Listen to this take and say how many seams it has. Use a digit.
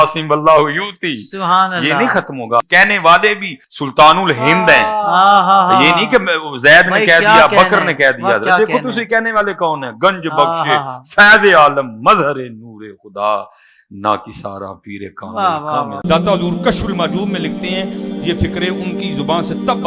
1